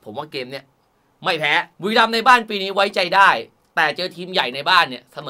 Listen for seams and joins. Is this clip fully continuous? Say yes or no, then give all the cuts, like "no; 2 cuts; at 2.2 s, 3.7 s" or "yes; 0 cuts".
no; 1 cut; at 1.7 s